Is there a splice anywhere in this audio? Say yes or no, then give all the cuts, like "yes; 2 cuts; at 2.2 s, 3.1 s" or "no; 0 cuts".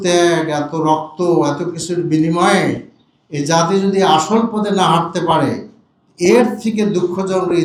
no; 0 cuts